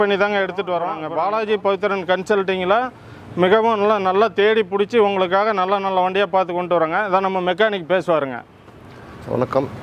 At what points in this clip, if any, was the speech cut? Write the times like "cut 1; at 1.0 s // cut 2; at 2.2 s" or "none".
cut 1; at 1.0 s

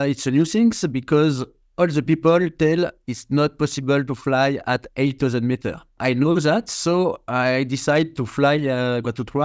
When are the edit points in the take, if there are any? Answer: cut 1; at 5.9 s

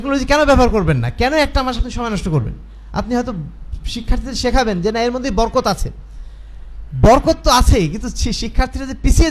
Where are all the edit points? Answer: none

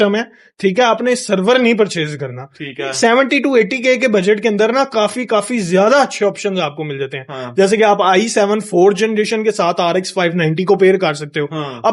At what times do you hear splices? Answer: none

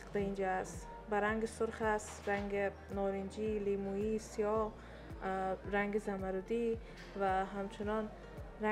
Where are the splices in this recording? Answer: none

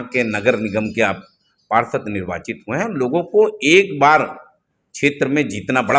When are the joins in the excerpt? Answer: none

